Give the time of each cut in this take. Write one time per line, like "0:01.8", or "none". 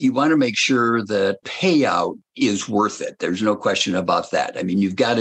0:01.5
0:02.2